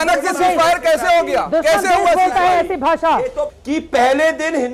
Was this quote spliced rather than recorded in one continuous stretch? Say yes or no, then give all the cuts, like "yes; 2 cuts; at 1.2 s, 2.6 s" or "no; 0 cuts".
yes; 1 cut; at 3.5 s